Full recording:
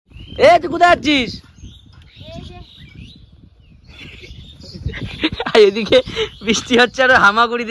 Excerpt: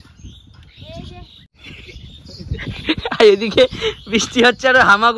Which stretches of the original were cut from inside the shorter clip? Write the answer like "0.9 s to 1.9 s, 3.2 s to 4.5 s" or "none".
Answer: 2.8 s to 3.8 s